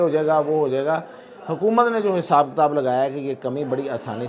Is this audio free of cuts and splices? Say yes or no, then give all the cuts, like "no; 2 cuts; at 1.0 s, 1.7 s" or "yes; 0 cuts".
yes; 0 cuts